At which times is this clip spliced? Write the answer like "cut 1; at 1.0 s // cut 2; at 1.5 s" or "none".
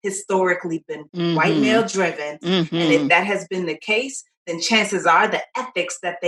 cut 1; at 1.0 s // cut 2; at 2.3 s